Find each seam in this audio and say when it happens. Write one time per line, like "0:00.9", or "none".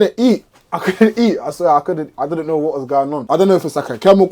0:03.2